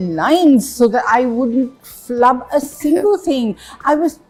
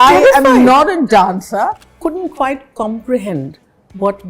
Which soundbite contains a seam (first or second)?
second